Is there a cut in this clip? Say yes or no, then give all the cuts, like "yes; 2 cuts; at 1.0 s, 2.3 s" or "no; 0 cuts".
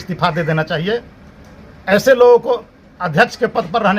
no; 0 cuts